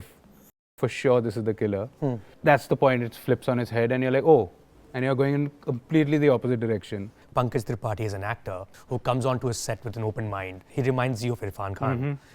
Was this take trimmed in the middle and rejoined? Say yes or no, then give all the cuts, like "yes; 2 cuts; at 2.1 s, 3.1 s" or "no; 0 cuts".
yes; 4 cuts; at 2.3 s, 7.2 s, 8.7 s, 10.6 s